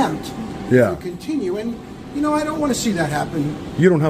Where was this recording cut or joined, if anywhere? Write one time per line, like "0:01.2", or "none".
none